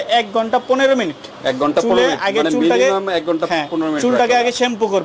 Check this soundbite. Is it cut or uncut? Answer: uncut